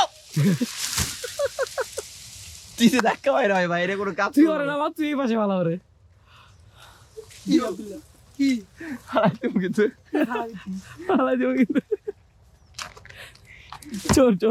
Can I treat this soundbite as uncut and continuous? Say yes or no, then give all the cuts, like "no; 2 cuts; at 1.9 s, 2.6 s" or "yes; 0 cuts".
yes; 0 cuts